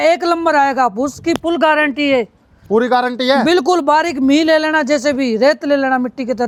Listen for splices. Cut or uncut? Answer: uncut